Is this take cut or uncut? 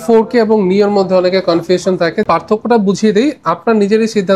cut